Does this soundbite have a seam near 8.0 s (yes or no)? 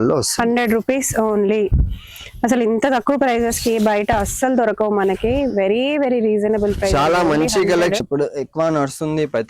yes